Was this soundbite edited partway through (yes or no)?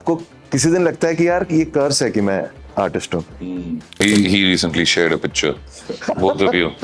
yes